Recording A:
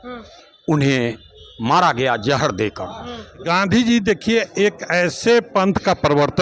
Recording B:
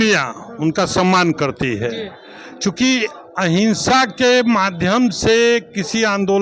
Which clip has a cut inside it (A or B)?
A